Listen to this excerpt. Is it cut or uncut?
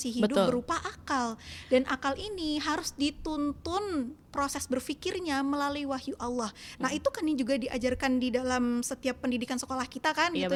uncut